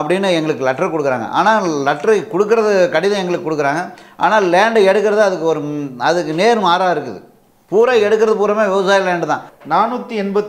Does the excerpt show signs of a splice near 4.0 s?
no; 1 cut; at 9.5 s

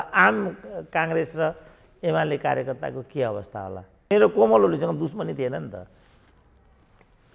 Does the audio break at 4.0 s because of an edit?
yes; 1 cut; at 4.0 s

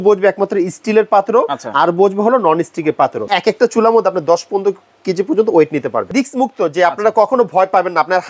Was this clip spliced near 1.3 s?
no; 2 cuts; at 3.3 s, 6.1 s

